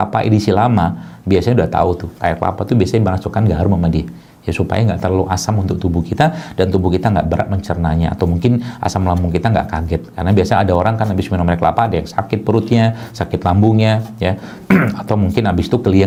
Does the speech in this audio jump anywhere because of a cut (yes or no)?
no